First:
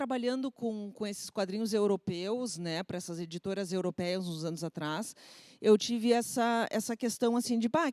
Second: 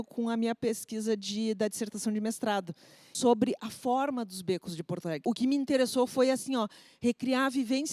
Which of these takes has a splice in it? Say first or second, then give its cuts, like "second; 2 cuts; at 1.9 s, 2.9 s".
second; 2 cuts; at 3.1 s, 5.2 s